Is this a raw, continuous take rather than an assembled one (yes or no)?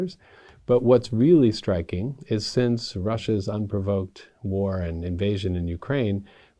yes